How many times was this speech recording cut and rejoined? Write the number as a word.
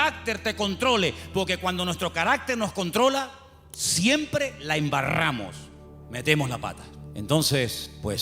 one